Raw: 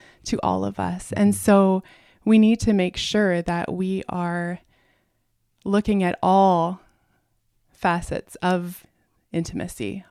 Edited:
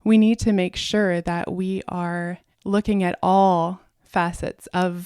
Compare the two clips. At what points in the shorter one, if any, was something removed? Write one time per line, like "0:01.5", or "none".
0:02.5
0:03.9